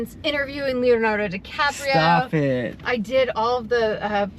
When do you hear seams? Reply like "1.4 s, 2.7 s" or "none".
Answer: none